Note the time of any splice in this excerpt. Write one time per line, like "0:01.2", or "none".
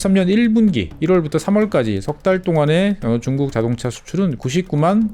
none